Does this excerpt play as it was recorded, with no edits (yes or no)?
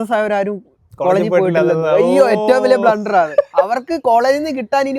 yes